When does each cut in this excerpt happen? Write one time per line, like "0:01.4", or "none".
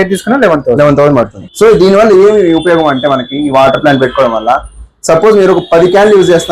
0:01.4